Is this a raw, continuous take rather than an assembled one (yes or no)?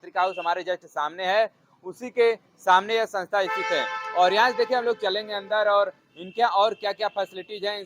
yes